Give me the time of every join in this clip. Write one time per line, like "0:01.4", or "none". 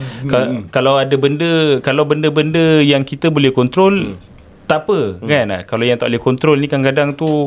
none